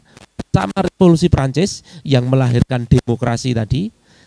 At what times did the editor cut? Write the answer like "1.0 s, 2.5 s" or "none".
none